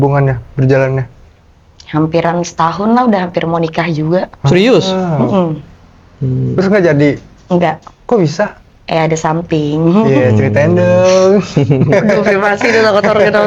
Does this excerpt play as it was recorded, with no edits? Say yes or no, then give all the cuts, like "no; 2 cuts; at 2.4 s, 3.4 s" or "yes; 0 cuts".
yes; 0 cuts